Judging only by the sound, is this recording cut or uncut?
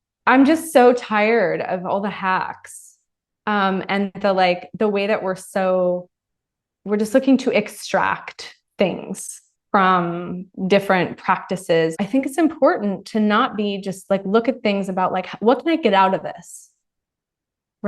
cut